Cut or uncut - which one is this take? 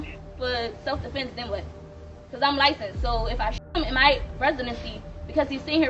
uncut